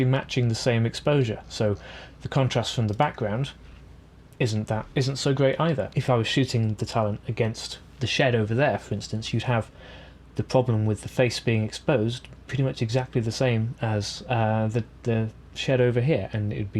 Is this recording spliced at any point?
no; 0 cuts

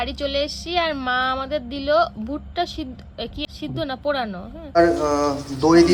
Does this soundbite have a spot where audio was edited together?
yes; 2 cuts; at 3.4 s, 4.5 s

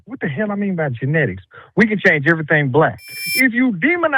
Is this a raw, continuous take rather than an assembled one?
no; 1 cut; at 3.2 s

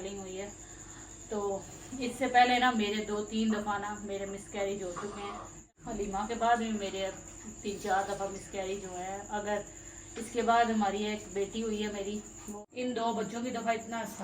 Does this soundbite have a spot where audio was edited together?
yes; 2 cuts; at 5.6 s, 12.4 s

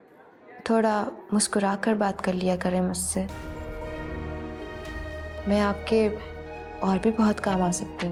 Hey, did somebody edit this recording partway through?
no; 0 cuts

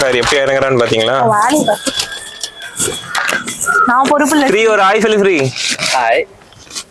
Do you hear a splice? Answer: no; 0 cuts

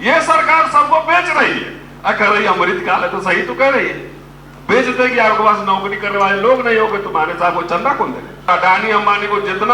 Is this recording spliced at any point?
yes; 1 cut; at 8.5 s

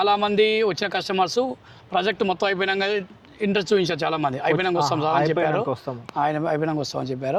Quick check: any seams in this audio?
no; 0 cuts

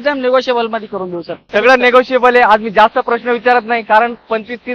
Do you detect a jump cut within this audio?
no; 0 cuts

